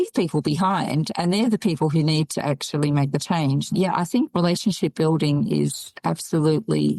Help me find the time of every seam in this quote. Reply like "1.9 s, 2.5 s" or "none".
none